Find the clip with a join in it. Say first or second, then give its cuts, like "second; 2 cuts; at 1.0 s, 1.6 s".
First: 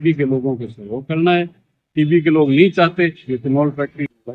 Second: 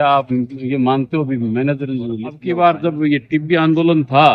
second; 1 cut; at 2.3 s